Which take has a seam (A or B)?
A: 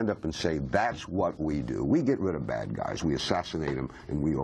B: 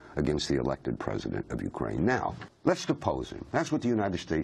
B